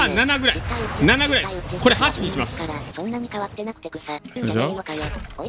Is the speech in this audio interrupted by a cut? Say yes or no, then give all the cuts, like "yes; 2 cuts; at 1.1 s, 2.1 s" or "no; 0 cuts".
no; 0 cuts